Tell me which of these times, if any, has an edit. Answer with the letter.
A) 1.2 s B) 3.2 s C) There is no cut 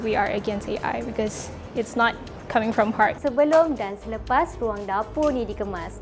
B